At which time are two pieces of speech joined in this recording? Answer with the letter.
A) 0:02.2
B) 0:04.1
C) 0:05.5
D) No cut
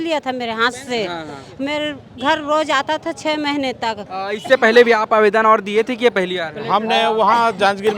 B